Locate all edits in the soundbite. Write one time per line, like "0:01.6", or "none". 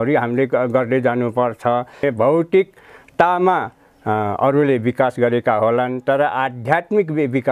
0:02.0